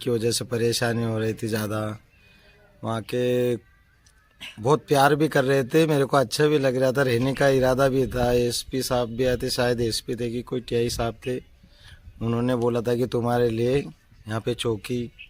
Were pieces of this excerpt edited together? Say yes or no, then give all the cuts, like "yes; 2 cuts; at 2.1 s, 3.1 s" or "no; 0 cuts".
no; 0 cuts